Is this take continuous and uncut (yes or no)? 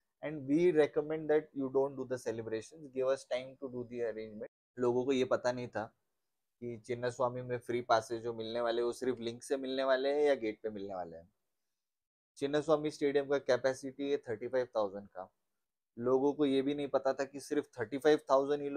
no